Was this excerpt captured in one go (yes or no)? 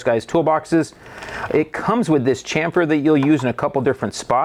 yes